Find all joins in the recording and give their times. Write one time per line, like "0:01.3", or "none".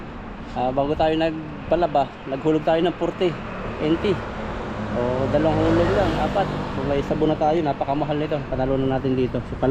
none